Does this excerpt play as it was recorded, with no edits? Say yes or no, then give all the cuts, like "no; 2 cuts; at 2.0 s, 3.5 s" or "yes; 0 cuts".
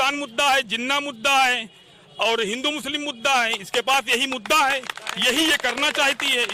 yes; 0 cuts